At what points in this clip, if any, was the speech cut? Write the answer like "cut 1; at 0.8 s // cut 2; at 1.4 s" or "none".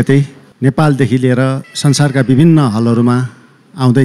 cut 1; at 1.7 s